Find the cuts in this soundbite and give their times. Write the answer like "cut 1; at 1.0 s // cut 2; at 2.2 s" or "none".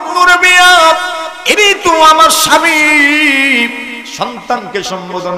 none